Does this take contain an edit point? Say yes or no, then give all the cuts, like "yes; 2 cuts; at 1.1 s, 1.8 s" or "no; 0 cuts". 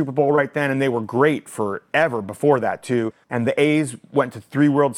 yes; 1 cut; at 3.2 s